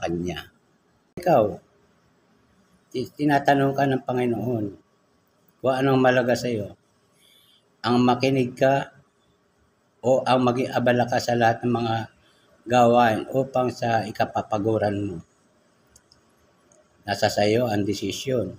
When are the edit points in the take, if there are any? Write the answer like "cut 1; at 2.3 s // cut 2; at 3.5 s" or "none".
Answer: cut 1; at 1.2 s